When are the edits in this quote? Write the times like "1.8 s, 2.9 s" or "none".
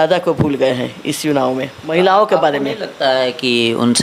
1.8 s